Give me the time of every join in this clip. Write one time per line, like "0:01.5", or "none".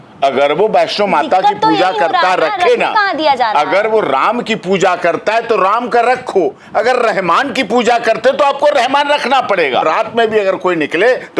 0:09.8